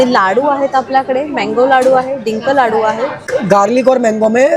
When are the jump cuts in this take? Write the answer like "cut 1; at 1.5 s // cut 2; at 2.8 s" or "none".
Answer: cut 1; at 3.2 s

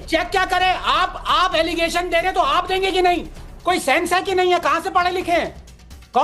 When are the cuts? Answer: none

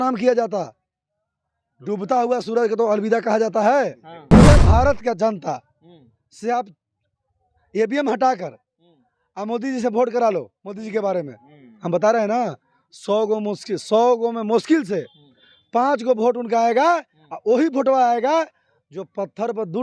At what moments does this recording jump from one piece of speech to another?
cut 1; at 4.4 s

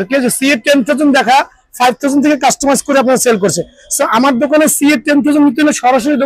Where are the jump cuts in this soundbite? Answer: none

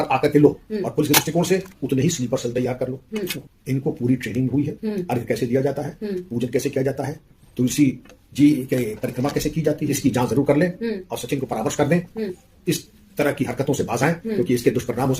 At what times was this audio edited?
cut 1; at 3.4 s // cut 2; at 9.9 s // cut 3; at 12.4 s

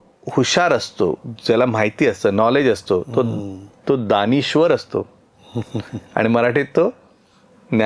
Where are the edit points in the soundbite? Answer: none

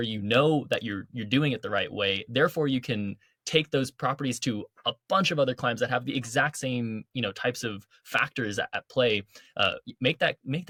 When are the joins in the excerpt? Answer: none

